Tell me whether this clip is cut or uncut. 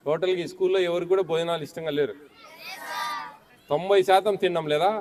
uncut